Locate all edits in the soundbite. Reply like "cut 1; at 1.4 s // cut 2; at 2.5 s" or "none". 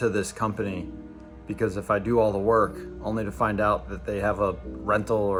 none